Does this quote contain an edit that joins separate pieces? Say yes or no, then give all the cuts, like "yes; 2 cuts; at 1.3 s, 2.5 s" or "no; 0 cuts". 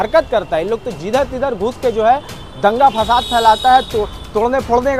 no; 0 cuts